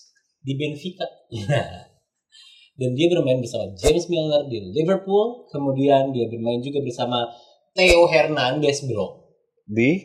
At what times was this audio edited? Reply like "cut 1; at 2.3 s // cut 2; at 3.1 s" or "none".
none